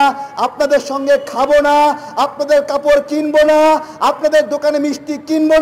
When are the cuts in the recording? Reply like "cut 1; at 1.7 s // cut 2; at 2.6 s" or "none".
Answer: none